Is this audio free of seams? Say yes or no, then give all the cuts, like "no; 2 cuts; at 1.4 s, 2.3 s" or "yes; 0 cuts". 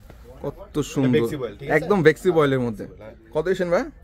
yes; 0 cuts